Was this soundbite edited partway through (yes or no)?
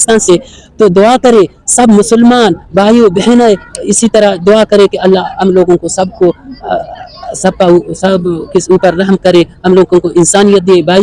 no